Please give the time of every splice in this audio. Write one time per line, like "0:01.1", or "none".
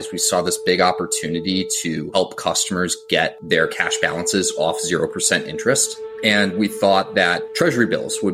0:03.4
0:07.4